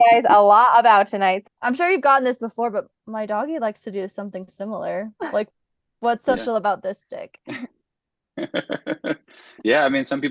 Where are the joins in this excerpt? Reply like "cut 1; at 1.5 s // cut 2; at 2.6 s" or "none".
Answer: cut 1; at 1.4 s